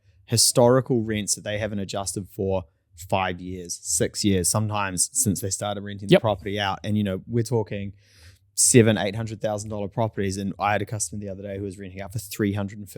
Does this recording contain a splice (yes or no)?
no